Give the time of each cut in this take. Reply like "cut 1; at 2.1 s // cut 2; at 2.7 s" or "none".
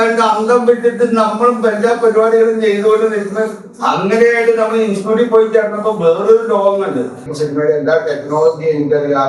cut 1; at 7.2 s

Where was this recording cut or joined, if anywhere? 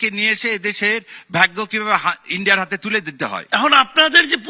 cut 1; at 3.4 s

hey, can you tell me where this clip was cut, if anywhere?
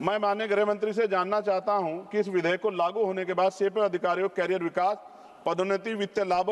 none

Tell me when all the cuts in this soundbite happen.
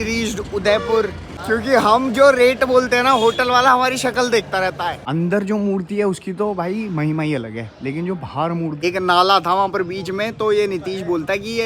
cut 1; at 1.3 s // cut 2; at 5.0 s // cut 3; at 8.8 s

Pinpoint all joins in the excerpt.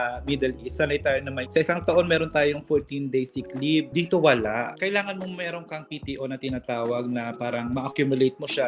none

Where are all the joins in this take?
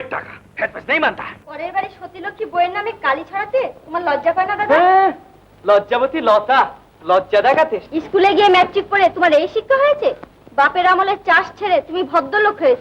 cut 1; at 1.4 s // cut 2; at 7.8 s

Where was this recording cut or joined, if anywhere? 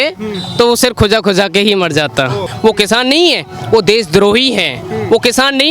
cut 1; at 2.5 s

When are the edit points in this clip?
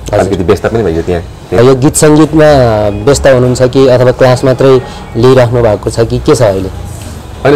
cut 1; at 1.6 s

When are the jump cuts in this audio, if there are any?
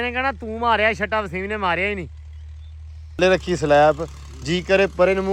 cut 1; at 3.2 s

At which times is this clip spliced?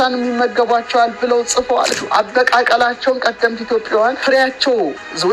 cut 1; at 1.9 s // cut 2; at 4.2 s

